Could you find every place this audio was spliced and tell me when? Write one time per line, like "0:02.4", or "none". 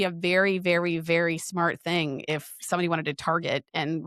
none